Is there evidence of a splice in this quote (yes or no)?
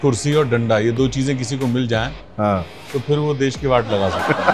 no